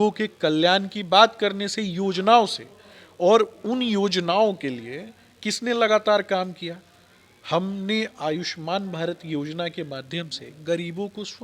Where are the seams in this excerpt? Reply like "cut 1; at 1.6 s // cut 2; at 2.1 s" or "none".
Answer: none